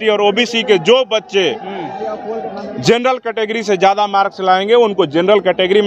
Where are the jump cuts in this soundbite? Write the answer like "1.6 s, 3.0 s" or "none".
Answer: none